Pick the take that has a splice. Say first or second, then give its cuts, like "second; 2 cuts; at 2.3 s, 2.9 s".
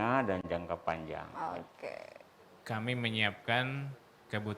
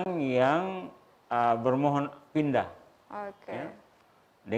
first; 1 cut; at 2.1 s